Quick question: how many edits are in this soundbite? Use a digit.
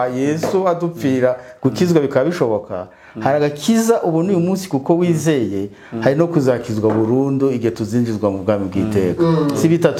0